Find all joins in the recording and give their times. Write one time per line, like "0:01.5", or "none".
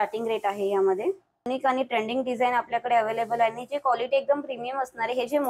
0:01.5